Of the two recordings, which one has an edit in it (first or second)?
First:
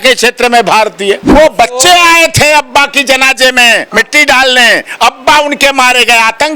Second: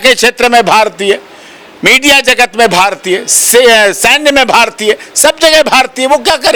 first